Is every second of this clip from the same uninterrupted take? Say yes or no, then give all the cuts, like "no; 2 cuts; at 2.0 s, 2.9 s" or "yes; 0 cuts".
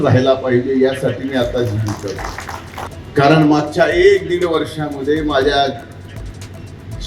no; 1 cut; at 3.0 s